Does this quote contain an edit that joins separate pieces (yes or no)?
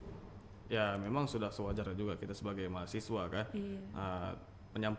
no